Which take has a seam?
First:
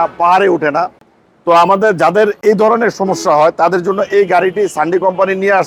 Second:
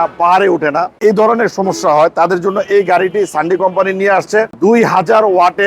second; 2 cuts; at 0.9 s, 4.5 s

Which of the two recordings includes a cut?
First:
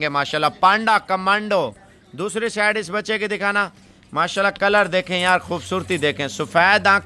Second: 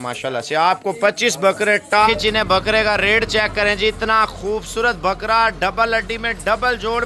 second; 1 cut; at 2.1 s

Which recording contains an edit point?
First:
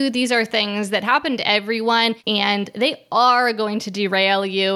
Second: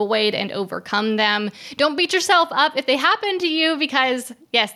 first; 1 cut; at 2.2 s

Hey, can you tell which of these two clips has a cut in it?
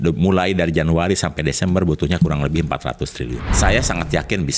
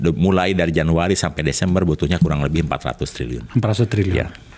first; 1 cut; at 3.4 s

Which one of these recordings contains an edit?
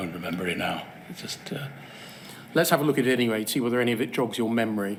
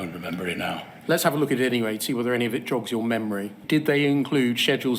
second; 2 cuts; at 0.9 s, 3.6 s

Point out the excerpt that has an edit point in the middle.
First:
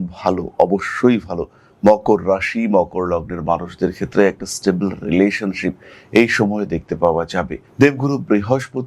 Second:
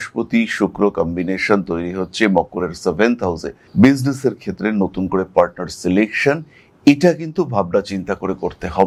first; 1 cut; at 7.6 s

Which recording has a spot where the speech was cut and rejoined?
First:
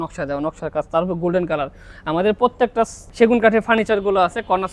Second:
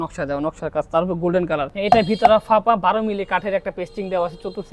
second; 1 cut; at 1.7 s

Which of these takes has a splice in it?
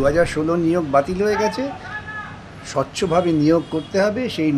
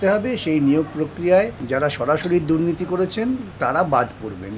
second; 2 cuts; at 1.6 s, 3.5 s

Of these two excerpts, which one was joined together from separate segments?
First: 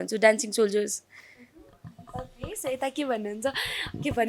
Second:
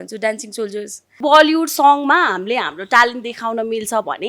second; 1 cut; at 1.2 s

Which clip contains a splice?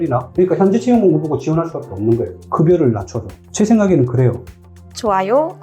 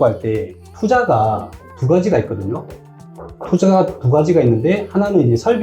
first; 1 cut; at 4.5 s

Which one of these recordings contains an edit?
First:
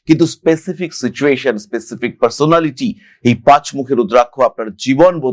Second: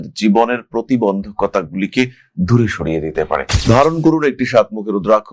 second; 1 cut; at 3.6 s

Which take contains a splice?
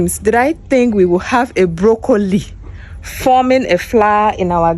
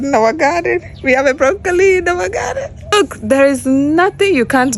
second; 1 cut; at 2.9 s

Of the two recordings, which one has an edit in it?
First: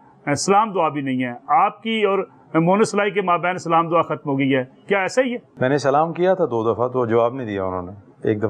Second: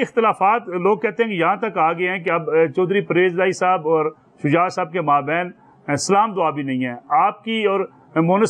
first; 1 cut; at 5.5 s

